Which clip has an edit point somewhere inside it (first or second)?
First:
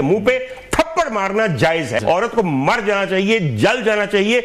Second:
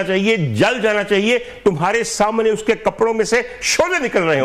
first